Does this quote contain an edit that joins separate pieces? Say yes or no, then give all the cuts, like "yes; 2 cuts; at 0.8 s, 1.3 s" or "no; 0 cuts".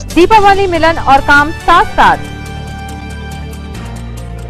no; 0 cuts